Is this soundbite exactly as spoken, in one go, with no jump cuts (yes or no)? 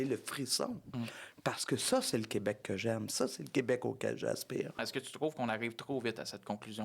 no